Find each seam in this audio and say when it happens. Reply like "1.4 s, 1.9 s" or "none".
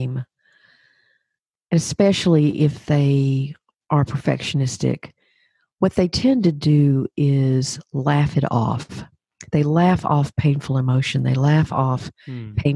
none